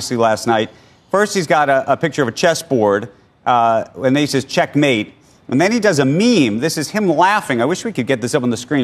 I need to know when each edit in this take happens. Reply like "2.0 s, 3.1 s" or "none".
none